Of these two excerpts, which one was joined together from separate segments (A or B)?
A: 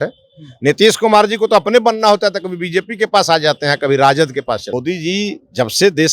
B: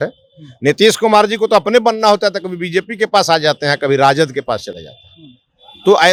A